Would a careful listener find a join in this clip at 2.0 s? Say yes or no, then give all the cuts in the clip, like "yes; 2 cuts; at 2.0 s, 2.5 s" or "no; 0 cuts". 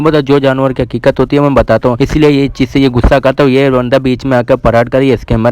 yes; 1 cut; at 2.0 s